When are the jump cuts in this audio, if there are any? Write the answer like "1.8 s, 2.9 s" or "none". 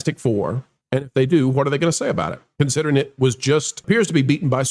3.7 s